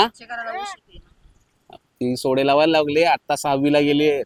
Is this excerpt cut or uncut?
uncut